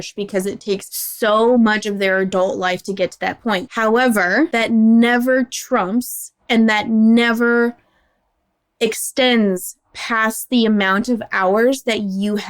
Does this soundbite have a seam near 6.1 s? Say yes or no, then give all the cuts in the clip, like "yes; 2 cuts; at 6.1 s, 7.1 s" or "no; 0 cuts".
no; 3 cuts; at 1.0 s, 3.7 s, 4.5 s